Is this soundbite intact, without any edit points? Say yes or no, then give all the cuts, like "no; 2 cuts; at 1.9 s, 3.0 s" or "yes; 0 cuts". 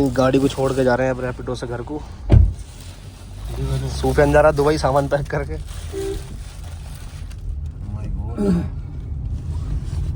yes; 0 cuts